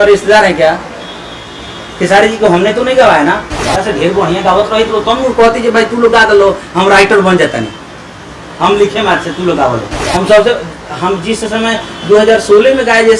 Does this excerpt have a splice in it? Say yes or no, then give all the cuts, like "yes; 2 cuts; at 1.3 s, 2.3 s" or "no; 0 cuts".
yes; 2 cuts; at 3.5 s, 10.0 s